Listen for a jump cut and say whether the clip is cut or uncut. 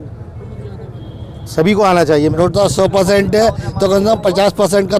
cut